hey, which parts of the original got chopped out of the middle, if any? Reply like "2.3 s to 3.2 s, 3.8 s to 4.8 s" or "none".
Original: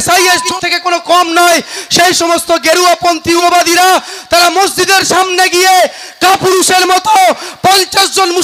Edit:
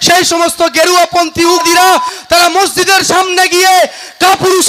3.5 s to 3.6 s

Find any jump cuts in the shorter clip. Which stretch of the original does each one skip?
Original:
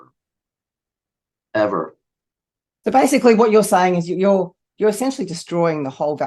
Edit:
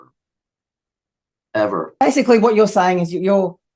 2.0 s to 3.0 s

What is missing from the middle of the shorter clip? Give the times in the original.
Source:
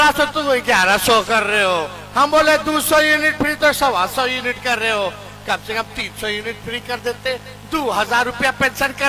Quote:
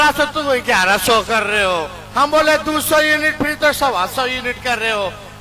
none

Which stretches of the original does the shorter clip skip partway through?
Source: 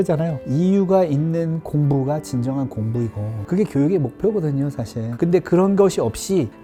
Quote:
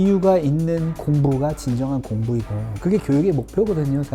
none

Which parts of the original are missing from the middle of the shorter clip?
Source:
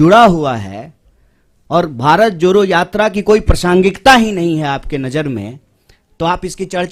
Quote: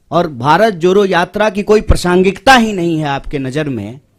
none

